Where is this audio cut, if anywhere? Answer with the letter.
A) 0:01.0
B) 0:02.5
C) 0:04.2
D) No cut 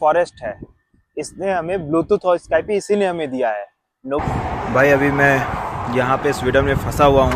C